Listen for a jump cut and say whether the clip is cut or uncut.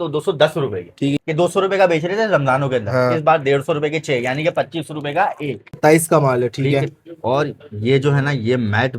cut